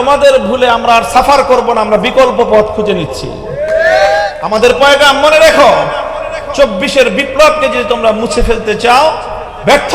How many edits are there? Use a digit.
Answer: 1